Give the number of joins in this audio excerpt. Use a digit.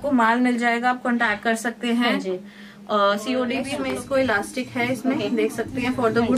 1